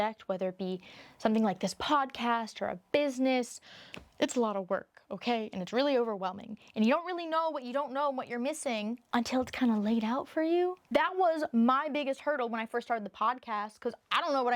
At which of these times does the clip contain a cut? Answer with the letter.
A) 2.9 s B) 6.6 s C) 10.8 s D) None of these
C